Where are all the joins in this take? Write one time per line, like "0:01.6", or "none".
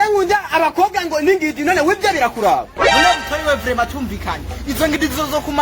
0:02.8